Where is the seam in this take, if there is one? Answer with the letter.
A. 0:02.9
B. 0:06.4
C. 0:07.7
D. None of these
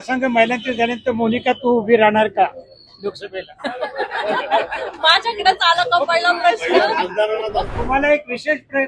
C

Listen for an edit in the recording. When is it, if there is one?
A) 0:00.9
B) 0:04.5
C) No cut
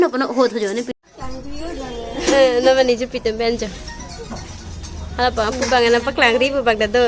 A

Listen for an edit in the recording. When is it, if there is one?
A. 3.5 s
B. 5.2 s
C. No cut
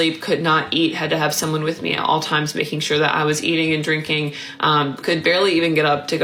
C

